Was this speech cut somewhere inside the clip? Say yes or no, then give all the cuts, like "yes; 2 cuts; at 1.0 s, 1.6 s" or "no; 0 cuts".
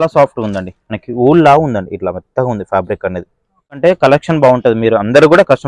yes; 1 cut; at 3.8 s